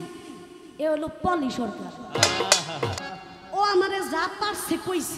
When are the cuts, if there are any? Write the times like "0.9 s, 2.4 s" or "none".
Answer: 3.0 s